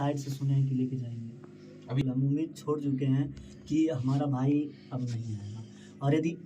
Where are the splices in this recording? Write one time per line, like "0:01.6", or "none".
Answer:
0:02.0